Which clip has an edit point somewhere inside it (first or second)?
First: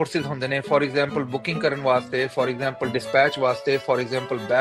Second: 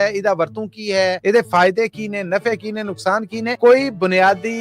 second